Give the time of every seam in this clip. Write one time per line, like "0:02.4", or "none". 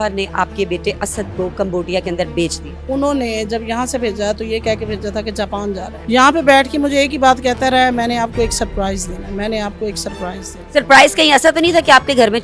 0:02.7
0:05.9